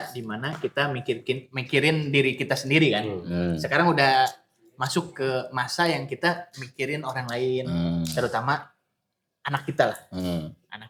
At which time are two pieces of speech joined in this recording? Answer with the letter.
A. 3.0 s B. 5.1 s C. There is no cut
C